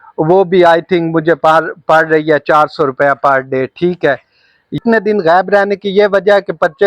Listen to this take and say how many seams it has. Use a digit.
1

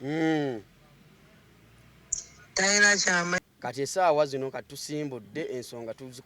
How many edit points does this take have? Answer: 1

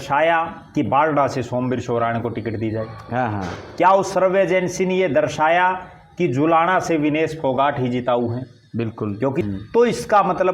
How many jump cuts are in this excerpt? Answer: 1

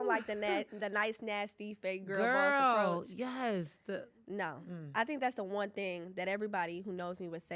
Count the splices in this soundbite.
0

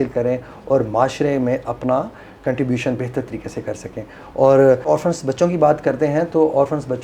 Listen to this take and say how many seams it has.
0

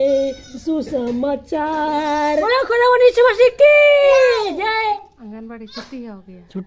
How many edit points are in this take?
2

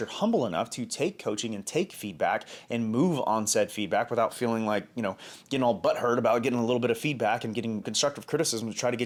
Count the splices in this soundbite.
0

